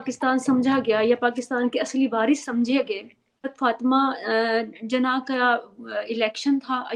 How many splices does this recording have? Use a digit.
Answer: 1